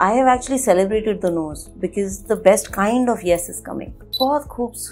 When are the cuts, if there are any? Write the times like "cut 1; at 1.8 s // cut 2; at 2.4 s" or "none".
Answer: cut 1; at 4.0 s